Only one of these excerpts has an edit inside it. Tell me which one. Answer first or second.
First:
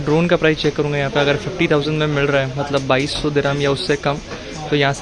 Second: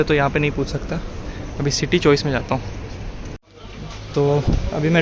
second